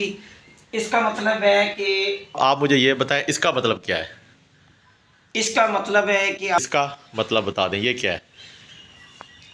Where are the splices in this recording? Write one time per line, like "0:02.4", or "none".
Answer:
0:02.4
0:06.6